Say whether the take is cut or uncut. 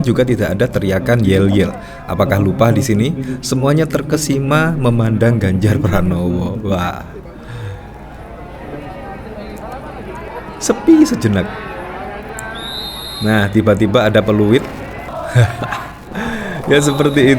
cut